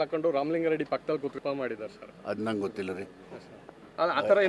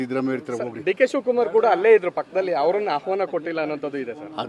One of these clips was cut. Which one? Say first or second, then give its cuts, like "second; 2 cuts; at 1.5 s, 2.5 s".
first; 1 cut; at 1.4 s